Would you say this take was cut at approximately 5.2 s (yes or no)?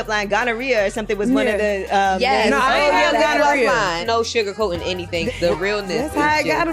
yes